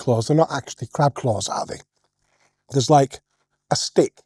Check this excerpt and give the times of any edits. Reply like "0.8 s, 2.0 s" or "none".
none